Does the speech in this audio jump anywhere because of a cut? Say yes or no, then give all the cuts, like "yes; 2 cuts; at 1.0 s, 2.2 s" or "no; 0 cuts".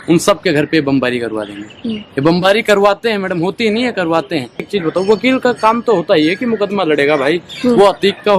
yes; 1 cut; at 4.7 s